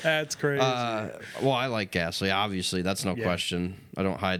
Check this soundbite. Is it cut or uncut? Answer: uncut